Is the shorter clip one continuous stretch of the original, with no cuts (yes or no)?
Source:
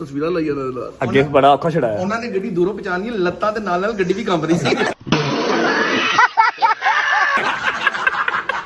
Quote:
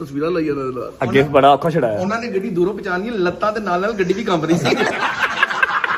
no